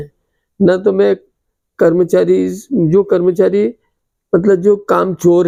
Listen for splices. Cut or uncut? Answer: uncut